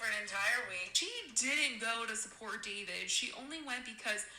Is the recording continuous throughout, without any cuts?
no; 1 cut; at 0.9 s

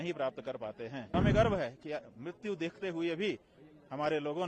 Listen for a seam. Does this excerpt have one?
yes; 1 cut; at 1.1 s

